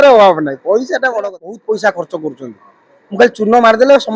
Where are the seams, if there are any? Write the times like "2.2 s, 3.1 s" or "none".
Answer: 1.5 s